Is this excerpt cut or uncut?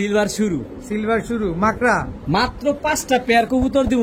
uncut